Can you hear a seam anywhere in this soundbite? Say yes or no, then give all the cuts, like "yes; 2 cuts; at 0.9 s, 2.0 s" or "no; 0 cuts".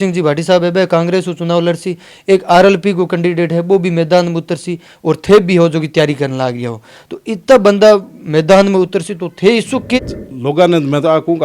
yes; 1 cut; at 10.0 s